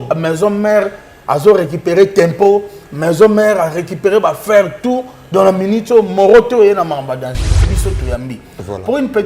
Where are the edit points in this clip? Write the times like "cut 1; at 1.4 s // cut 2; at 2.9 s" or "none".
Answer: cut 1; at 7.7 s

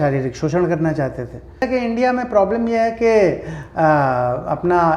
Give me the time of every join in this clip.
cut 1; at 1.6 s

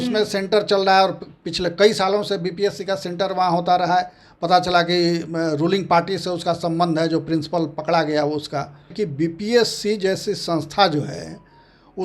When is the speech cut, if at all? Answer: cut 1; at 8.9 s

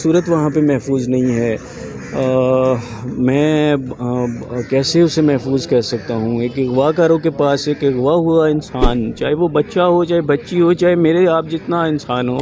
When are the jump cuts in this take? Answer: none

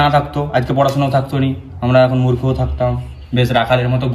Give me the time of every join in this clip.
none

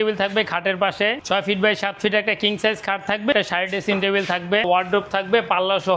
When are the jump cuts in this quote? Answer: cut 1; at 1.2 s // cut 2; at 3.3 s // cut 3; at 4.7 s

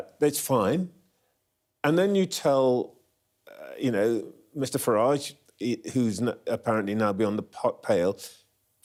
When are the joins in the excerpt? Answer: none

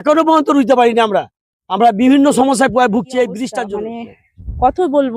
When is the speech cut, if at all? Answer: cut 1; at 3.6 s

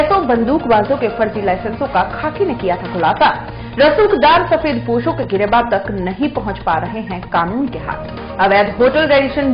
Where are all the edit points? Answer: none

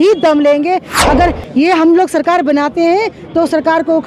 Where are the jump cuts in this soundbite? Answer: cut 1; at 0.9 s

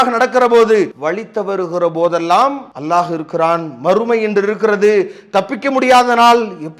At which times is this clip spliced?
cut 1; at 1.0 s // cut 2; at 2.7 s

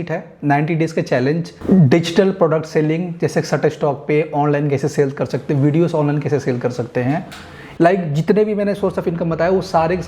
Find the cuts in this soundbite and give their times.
cut 1; at 1.6 s // cut 2; at 7.6 s

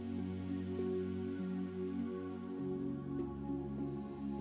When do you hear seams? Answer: none

